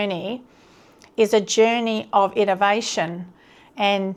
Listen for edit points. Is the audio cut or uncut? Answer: uncut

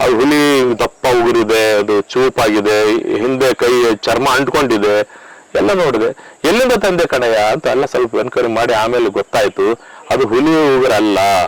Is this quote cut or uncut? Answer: uncut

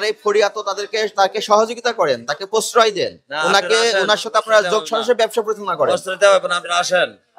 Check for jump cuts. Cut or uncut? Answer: uncut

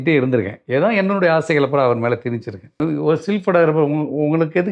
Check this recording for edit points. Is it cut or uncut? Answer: cut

